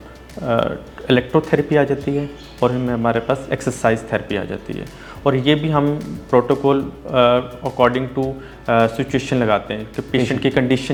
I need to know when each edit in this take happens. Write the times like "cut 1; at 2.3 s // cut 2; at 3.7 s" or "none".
none